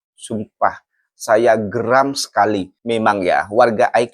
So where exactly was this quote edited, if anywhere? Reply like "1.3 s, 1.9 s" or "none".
2.7 s